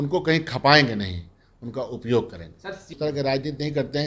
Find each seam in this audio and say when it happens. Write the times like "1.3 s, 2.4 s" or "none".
2.9 s